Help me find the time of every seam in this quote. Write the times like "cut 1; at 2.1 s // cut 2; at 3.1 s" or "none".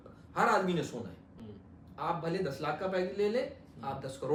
none